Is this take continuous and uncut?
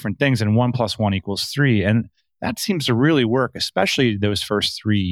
yes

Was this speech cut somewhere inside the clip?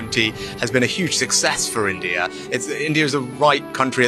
no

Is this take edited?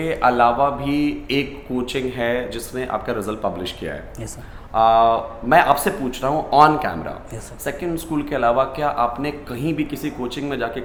no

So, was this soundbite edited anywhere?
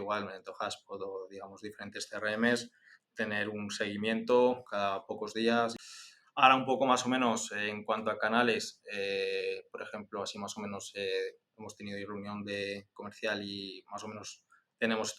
yes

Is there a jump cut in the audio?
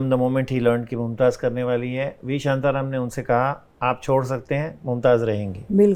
no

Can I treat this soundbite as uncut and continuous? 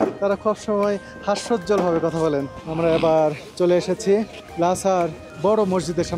no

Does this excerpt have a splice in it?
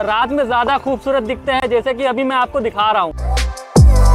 no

